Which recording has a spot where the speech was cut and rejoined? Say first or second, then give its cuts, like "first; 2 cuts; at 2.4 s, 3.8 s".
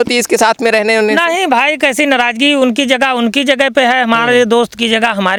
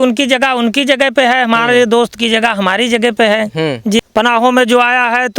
second; 1 cut; at 4.0 s